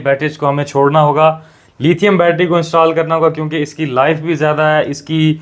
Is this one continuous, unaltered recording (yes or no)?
yes